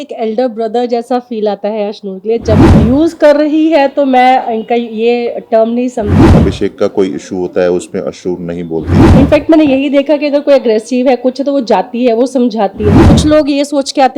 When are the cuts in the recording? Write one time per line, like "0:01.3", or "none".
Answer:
0:02.7
0:06.3
0:09.0
0:13.0